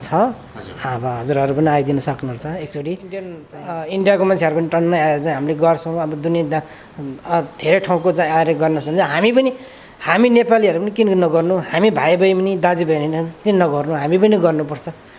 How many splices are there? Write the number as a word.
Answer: one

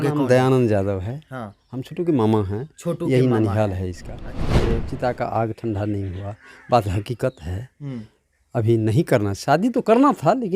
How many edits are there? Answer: one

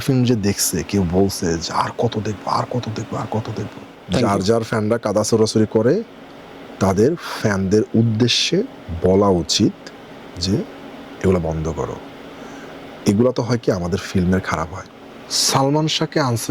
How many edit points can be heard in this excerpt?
two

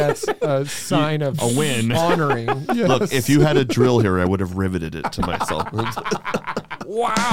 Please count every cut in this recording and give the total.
zero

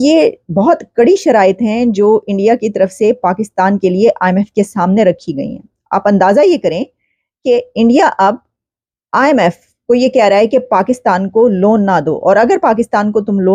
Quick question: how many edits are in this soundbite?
zero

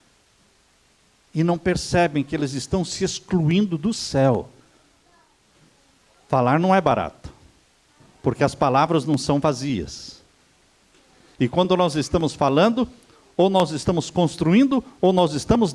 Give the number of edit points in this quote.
one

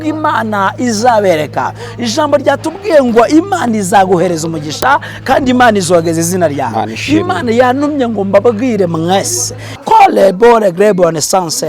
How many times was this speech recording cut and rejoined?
one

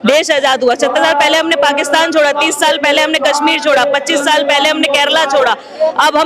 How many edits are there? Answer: zero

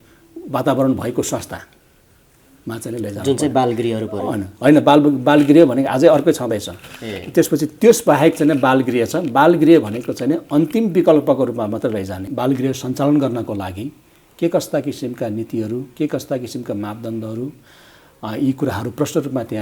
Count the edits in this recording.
one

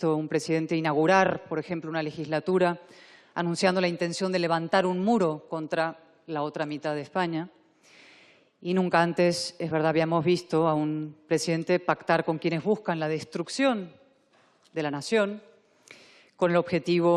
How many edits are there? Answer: zero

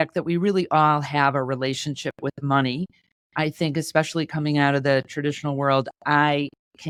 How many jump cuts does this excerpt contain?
zero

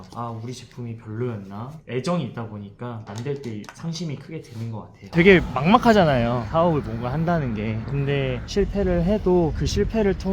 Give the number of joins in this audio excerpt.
one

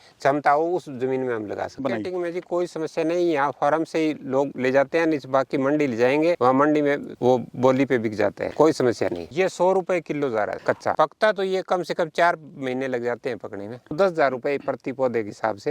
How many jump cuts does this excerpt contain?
four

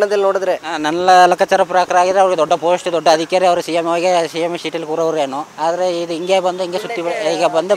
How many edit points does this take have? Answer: one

